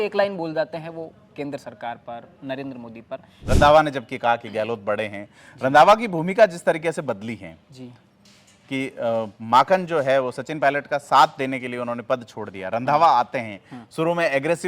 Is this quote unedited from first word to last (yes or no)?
no